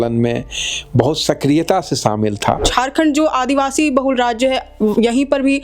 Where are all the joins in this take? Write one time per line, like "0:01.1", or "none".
0:02.7